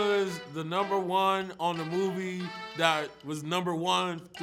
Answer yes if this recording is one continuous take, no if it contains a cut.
yes